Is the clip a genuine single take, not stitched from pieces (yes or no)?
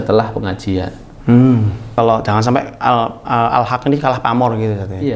no